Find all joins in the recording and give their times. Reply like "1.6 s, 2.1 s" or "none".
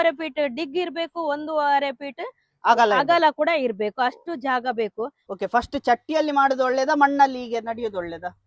5.2 s